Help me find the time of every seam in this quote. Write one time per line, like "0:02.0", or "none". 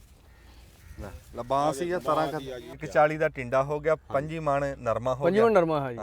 0:02.8